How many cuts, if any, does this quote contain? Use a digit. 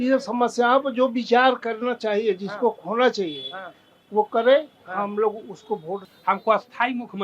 1